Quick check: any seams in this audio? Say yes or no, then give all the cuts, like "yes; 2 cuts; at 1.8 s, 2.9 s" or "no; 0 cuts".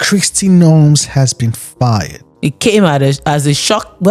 no; 0 cuts